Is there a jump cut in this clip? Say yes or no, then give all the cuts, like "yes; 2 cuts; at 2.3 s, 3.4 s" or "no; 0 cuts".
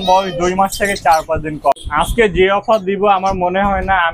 yes; 1 cut; at 1.7 s